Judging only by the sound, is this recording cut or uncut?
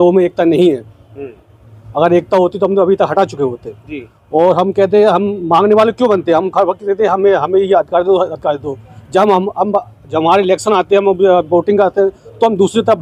uncut